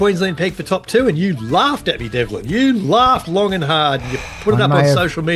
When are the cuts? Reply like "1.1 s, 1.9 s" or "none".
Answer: none